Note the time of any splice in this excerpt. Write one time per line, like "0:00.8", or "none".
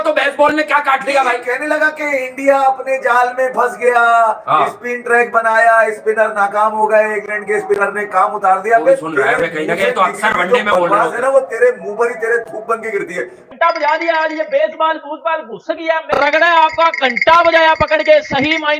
0:13.5
0:16.0